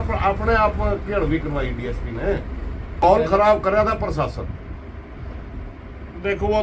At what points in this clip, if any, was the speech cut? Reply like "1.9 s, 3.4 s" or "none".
3.0 s